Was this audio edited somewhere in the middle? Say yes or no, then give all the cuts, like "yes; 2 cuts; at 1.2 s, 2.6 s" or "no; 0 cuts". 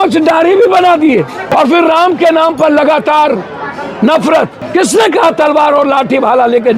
yes; 2 cuts; at 1.5 s, 4.6 s